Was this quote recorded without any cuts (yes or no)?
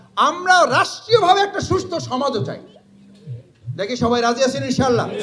yes